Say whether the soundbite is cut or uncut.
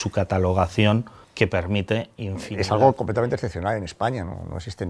cut